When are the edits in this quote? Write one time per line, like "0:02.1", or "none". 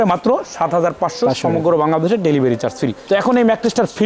none